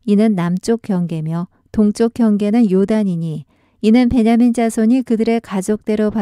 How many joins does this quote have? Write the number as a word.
one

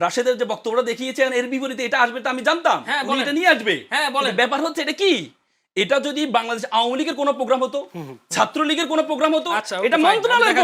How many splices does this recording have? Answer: zero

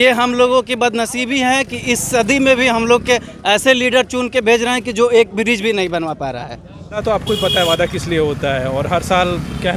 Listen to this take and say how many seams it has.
one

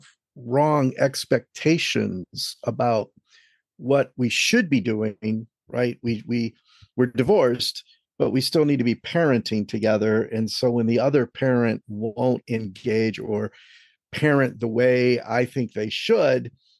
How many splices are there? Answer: zero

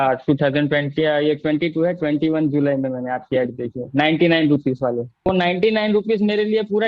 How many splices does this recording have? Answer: one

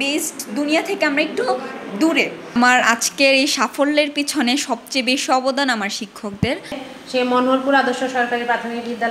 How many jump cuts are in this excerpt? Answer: two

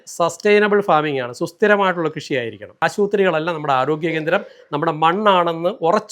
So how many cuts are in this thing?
one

